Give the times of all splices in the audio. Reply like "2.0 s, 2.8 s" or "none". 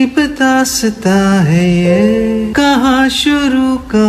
2.5 s